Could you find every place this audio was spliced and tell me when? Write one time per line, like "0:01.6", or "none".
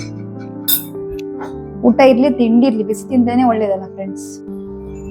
0:01.8
0:03.8